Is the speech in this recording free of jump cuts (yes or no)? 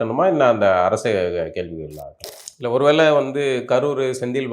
no